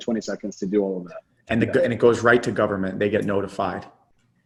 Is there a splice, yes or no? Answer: no